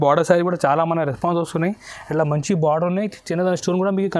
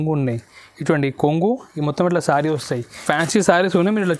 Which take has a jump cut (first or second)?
second